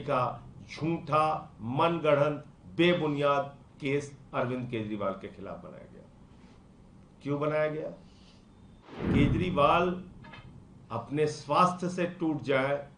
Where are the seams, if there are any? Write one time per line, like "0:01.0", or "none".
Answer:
0:09.0